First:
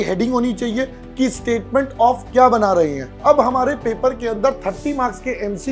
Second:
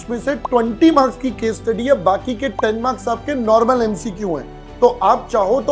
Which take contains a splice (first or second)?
first